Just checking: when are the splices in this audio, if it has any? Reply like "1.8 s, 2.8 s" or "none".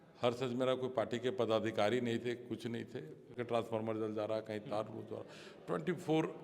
3.3 s